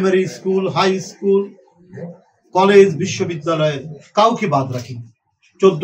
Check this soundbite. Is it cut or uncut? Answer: uncut